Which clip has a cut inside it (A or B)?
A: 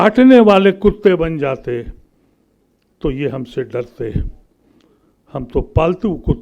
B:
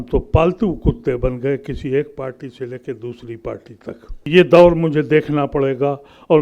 B